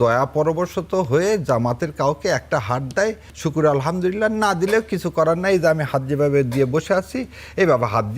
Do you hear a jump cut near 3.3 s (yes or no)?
yes